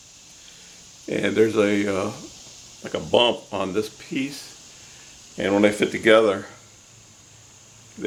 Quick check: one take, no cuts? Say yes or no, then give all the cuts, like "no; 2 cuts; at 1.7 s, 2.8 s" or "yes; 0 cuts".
yes; 0 cuts